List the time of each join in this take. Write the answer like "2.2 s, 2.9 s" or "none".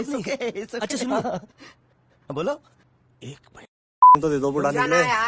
4.2 s